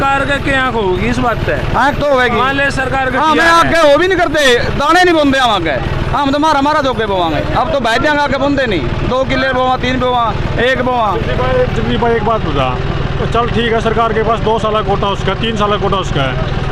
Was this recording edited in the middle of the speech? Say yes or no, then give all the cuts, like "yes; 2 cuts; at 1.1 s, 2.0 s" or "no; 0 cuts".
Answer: no; 0 cuts